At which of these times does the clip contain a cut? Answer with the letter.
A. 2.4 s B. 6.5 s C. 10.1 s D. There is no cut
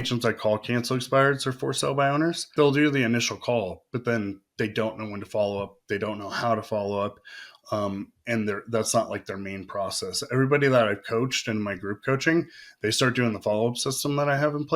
A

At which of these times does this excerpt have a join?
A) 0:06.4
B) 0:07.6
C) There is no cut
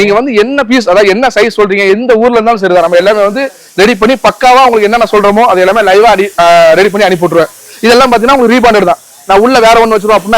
C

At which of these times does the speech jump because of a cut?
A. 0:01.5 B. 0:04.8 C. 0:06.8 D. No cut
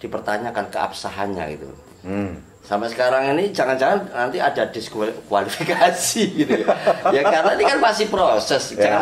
D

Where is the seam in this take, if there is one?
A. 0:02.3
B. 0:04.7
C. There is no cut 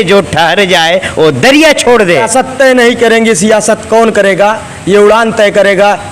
A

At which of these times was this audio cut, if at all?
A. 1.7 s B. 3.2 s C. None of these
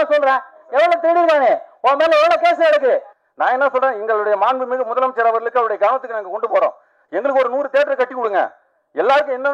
B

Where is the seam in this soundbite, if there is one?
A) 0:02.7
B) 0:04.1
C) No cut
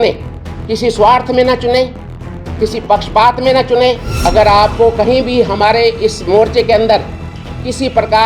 B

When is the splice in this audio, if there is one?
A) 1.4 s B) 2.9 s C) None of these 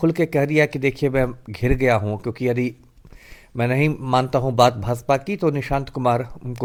C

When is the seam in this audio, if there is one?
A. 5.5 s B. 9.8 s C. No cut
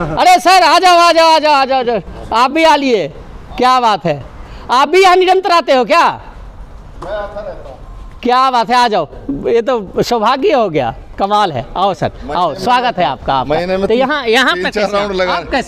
C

